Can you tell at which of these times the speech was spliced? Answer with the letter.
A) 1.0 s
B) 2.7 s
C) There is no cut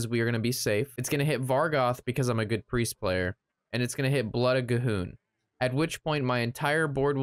A